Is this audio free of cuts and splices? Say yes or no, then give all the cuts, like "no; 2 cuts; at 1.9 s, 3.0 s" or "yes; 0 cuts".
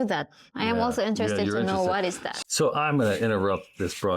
no; 1 cut; at 2.3 s